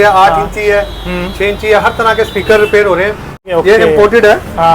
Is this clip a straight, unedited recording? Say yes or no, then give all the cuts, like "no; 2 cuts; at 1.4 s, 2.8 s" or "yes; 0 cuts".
no; 1 cut; at 3.4 s